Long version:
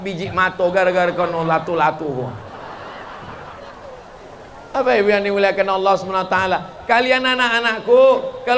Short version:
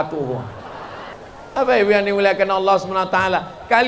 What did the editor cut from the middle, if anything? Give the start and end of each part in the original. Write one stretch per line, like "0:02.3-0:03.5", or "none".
0:03.0-0:04.3